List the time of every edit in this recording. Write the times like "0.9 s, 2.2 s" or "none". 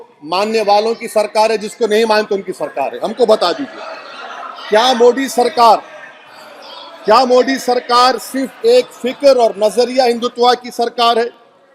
none